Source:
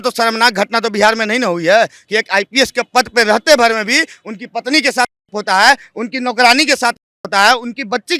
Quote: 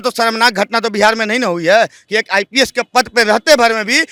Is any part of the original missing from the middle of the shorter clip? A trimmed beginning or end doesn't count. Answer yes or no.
no